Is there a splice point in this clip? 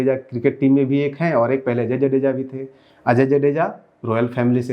no; 0 cuts

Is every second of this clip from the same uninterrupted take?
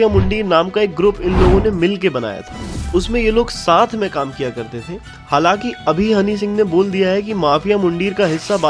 yes; 0 cuts

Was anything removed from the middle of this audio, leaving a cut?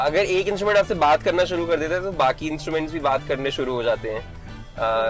no; 0 cuts

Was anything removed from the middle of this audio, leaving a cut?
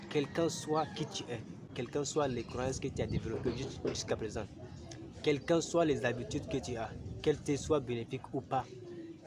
yes; 1 cut; at 1.7 s

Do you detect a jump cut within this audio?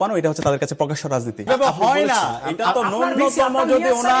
yes; 1 cut; at 1.5 s

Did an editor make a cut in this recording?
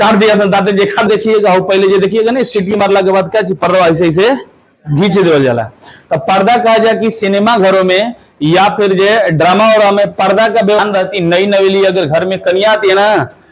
yes; 2 cuts; at 1.1 s, 10.8 s

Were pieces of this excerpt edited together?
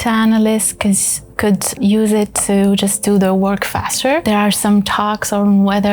yes; 2 cuts; at 1.8 s, 4.3 s

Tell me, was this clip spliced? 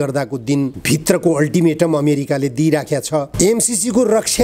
yes; 1 cut; at 3.3 s

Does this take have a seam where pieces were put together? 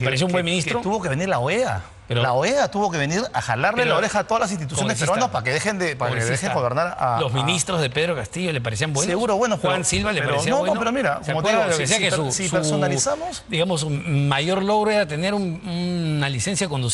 no; 0 cuts

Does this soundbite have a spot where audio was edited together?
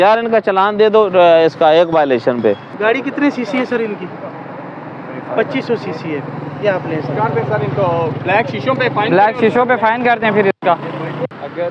no; 0 cuts

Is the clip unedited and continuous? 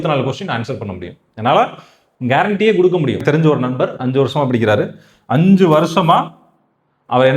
no; 1 cut; at 3.2 s

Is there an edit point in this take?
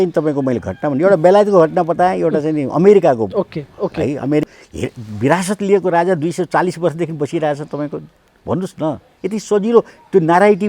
yes; 1 cut; at 4.5 s

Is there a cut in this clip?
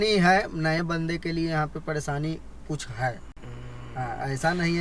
no; 0 cuts

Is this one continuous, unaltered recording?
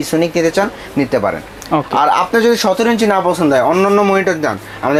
yes; 0 cuts

